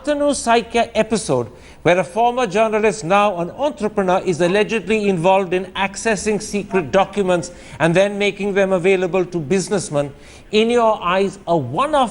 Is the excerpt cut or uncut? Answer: cut